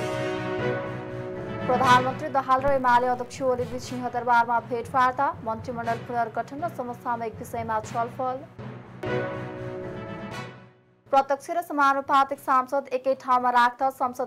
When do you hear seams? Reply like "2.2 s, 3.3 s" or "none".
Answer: 1.2 s